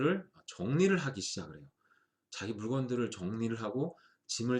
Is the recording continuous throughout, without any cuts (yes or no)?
yes